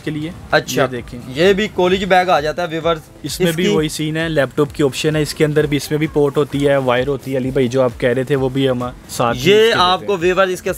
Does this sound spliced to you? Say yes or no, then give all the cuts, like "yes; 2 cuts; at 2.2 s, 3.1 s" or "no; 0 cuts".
no; 0 cuts